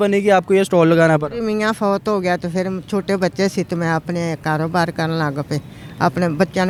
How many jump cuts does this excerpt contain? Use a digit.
0